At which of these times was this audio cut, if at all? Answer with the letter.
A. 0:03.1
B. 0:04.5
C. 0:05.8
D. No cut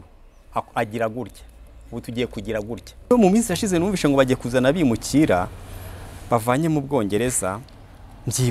A